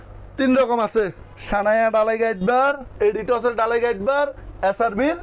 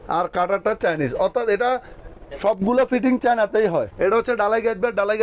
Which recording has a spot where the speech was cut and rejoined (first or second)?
second